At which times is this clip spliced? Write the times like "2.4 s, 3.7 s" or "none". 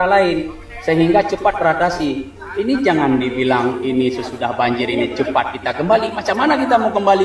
none